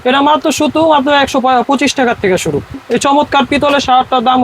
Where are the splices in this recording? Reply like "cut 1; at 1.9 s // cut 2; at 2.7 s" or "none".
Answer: cut 1; at 2.8 s

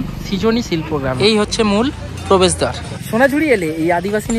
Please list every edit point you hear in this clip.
cut 1; at 1.2 s // cut 2; at 3.1 s

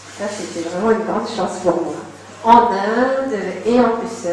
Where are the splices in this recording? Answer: cut 1; at 1.2 s

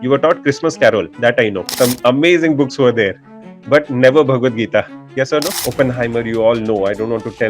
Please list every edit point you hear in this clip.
cut 1; at 1.6 s // cut 2; at 5.6 s

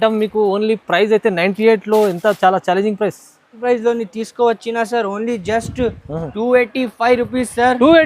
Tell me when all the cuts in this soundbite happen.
cut 1; at 3.5 s

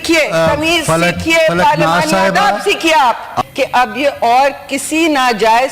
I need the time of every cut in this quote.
cut 1; at 3.3 s

